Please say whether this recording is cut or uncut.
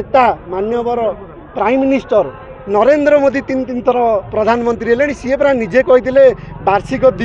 uncut